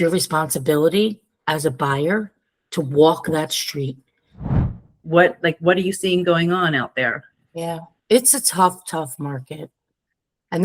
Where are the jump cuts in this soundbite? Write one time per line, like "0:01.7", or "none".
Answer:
0:04.5

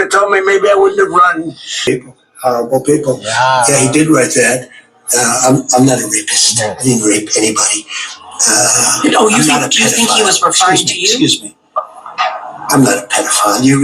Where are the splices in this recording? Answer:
0:01.8

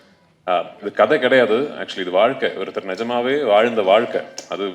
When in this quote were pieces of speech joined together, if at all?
none

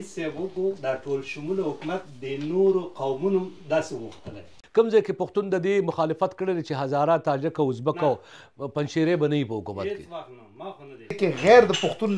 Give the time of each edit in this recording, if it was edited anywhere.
0:04.6
0:11.2

